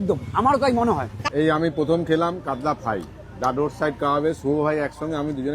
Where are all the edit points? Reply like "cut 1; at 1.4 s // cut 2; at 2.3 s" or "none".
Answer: cut 1; at 1.1 s